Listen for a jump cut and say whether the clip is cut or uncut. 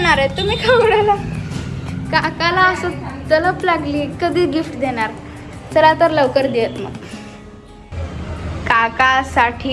uncut